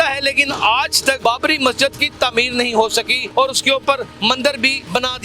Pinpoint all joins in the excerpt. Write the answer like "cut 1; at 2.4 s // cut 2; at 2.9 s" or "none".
cut 1; at 1.2 s // cut 2; at 3.2 s // cut 3; at 4.3 s